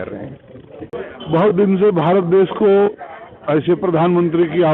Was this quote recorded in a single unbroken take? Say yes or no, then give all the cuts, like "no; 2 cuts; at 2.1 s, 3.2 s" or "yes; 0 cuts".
no; 1 cut; at 0.9 s